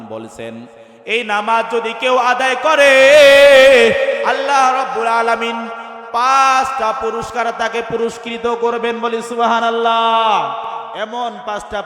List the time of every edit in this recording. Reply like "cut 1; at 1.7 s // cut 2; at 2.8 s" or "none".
cut 1; at 10.9 s